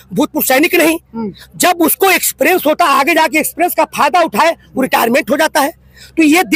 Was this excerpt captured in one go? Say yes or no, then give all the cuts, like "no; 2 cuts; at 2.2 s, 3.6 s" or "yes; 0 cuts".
yes; 0 cuts